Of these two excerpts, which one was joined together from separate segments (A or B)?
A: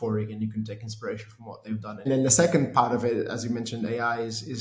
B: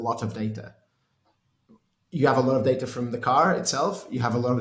A